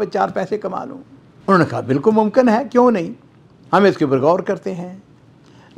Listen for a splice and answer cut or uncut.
uncut